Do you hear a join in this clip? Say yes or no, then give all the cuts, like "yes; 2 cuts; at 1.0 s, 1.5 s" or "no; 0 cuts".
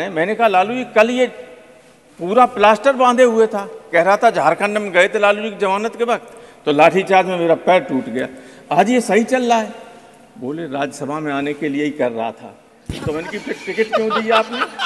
no; 0 cuts